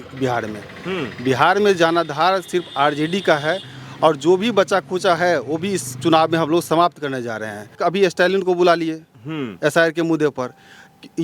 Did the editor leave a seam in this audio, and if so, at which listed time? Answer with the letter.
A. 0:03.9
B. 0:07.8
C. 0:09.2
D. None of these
B